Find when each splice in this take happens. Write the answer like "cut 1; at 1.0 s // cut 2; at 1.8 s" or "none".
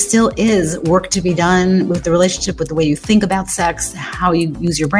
none